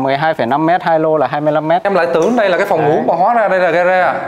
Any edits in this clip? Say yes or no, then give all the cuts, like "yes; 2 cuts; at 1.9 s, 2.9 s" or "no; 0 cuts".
yes; 1 cut; at 1.9 s